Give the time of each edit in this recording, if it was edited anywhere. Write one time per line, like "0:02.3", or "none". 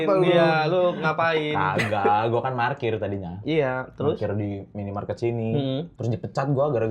0:05.9